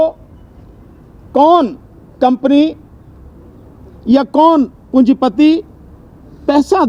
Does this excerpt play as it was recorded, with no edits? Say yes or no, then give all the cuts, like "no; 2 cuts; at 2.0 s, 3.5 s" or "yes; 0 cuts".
yes; 0 cuts